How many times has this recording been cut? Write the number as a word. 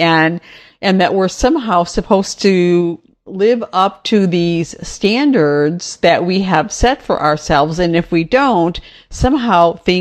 zero